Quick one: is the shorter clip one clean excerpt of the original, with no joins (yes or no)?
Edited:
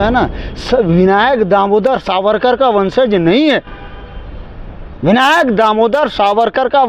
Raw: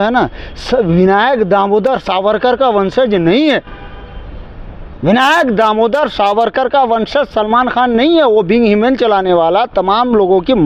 yes